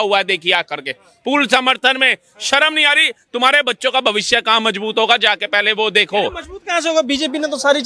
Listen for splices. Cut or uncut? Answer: uncut